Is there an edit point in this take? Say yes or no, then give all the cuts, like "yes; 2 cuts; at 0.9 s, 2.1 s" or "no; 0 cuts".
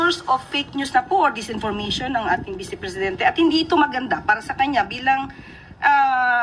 no; 0 cuts